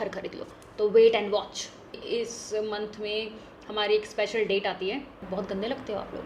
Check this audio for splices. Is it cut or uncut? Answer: cut